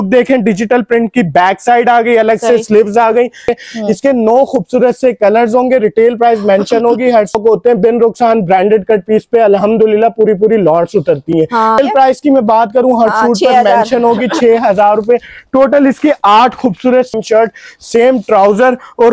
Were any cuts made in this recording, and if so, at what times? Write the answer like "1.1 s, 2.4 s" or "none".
3.5 s, 7.4 s, 11.8 s, 17.1 s